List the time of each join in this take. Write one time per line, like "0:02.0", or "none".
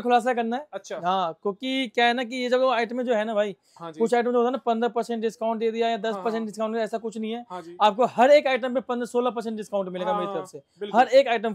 none